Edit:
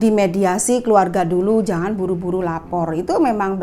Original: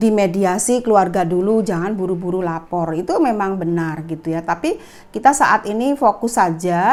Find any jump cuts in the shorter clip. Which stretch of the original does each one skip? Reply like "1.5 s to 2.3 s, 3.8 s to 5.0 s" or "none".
none